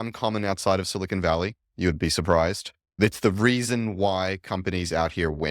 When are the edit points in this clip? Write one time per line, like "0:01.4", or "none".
0:03.1